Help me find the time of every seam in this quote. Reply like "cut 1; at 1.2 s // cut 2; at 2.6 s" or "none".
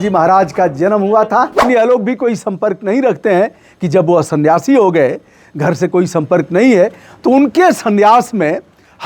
cut 1; at 1.6 s